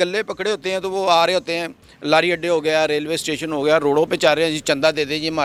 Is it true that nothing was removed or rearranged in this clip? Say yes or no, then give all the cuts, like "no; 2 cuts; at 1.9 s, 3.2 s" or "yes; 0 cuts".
yes; 0 cuts